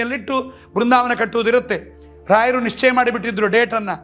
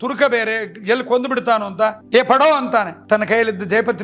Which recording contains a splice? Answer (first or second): second